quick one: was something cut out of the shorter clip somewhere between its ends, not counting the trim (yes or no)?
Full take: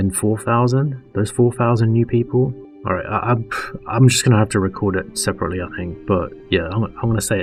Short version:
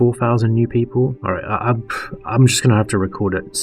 yes